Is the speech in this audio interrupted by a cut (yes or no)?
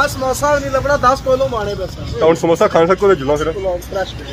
yes